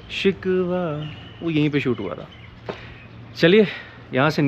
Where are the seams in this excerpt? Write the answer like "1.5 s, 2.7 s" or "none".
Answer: none